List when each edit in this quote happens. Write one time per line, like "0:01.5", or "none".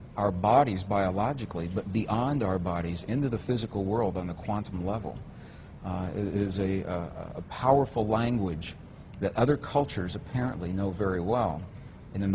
0:08.8